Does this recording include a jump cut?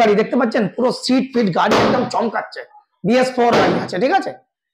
no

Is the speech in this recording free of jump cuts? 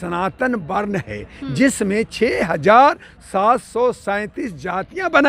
yes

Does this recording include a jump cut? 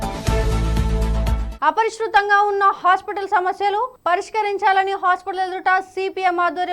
yes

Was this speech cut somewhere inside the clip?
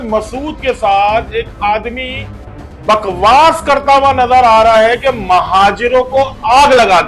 no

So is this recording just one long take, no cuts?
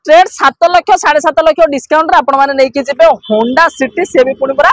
yes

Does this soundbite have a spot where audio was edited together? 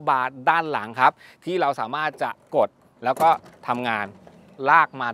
no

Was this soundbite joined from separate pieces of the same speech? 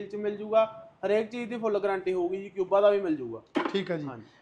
no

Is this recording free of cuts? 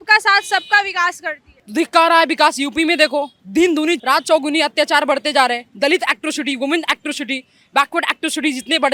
yes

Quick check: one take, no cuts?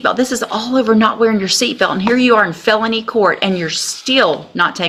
yes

